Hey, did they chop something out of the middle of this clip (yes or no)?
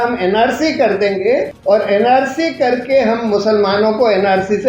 yes